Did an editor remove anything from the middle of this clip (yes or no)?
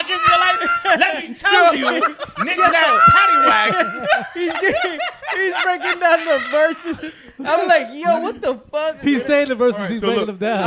no